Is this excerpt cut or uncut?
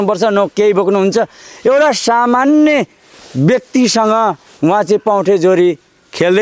uncut